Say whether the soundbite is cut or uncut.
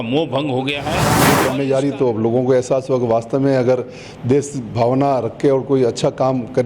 cut